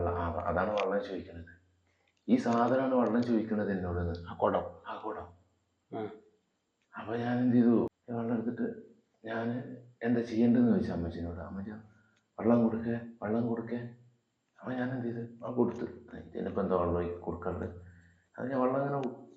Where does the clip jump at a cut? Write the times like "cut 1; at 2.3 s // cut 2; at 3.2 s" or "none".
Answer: cut 1; at 8.0 s